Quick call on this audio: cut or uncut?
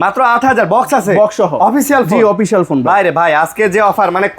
uncut